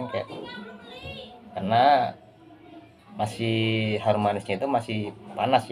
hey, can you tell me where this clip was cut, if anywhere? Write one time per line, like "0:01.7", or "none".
0:01.5